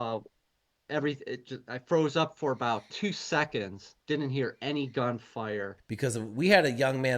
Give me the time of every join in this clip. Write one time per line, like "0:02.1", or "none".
0:05.8